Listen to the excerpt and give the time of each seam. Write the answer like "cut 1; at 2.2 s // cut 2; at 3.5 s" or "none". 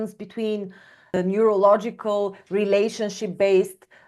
cut 1; at 1.1 s